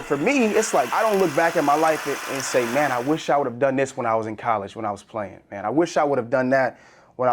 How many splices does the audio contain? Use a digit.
1